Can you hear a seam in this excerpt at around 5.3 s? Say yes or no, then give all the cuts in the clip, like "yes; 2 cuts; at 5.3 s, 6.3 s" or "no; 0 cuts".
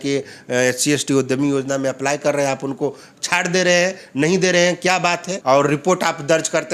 yes; 1 cut; at 5.3 s